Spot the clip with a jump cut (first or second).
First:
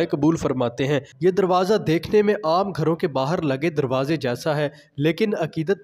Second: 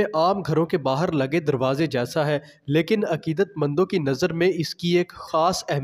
first